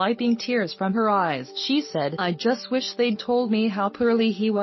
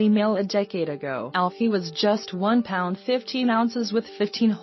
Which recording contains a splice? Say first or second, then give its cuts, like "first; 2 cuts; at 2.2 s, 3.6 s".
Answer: second; 1 cut; at 1.2 s